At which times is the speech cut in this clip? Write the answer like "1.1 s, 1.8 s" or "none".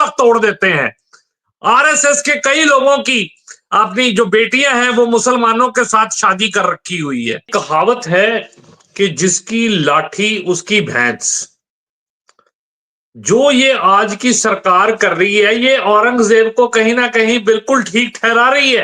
7.5 s